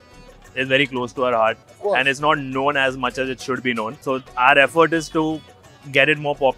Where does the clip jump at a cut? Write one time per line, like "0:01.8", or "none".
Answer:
0:04.0